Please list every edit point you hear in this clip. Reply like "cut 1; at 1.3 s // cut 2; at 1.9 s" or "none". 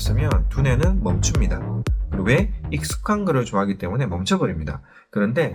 none